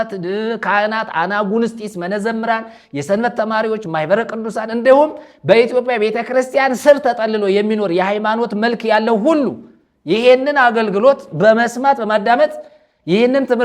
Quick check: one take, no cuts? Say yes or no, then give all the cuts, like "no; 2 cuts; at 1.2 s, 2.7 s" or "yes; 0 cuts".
yes; 0 cuts